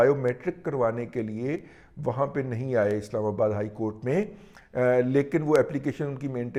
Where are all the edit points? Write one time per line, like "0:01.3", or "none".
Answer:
none